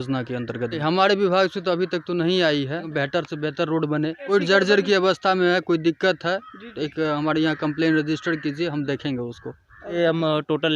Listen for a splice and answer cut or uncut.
cut